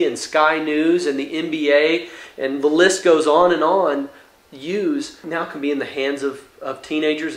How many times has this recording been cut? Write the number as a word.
one